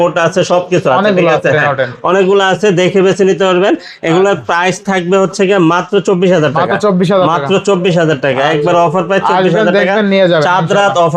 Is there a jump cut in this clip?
no; 0 cuts

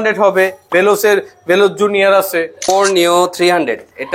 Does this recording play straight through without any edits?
no; 1 cut; at 2.7 s

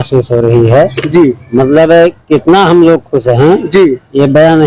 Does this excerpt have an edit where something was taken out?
no; 0 cuts

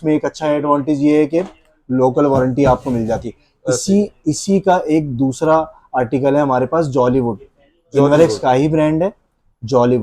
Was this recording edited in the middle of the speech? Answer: no; 0 cuts

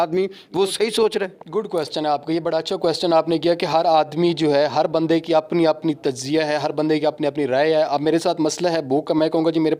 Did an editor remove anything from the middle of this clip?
no; 0 cuts

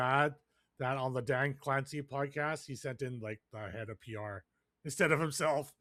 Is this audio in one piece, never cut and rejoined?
yes; 0 cuts

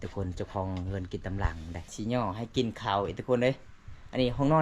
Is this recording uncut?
no; 1 cut; at 1.9 s

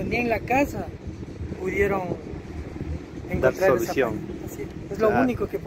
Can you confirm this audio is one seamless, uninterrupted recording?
yes; 0 cuts

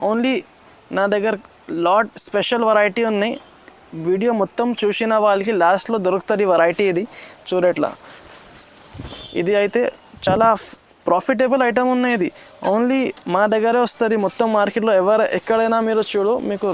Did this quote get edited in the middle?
no; 0 cuts

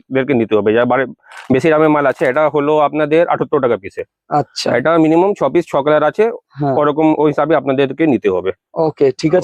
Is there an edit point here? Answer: no; 0 cuts

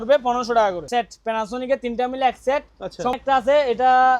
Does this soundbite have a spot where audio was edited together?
yes; 2 cuts; at 0.8 s, 3.2 s

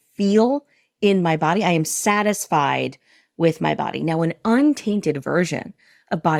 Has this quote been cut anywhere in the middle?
no; 0 cuts

